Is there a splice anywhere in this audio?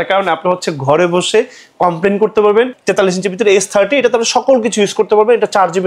yes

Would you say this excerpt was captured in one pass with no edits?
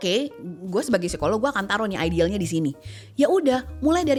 yes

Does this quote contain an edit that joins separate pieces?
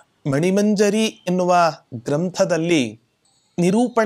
no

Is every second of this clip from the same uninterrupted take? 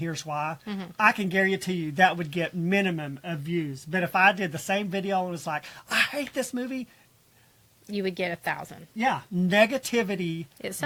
yes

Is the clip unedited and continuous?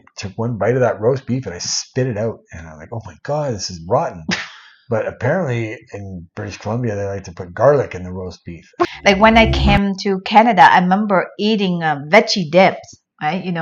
no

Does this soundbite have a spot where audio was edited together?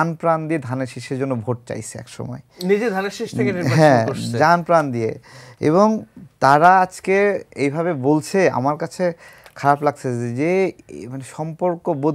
no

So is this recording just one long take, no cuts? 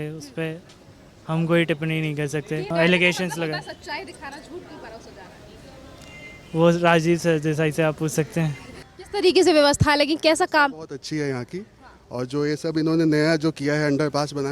no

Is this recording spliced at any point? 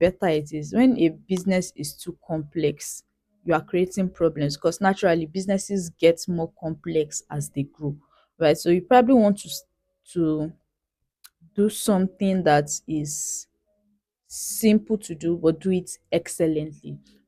no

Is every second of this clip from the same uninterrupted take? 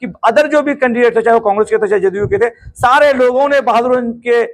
yes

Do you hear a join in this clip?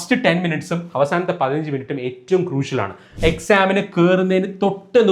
yes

